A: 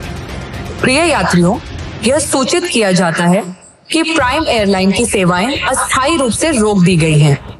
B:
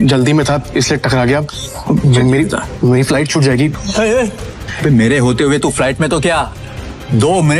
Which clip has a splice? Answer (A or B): B